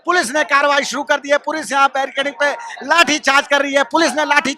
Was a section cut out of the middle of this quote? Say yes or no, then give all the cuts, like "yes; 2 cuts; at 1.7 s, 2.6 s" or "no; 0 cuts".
no; 0 cuts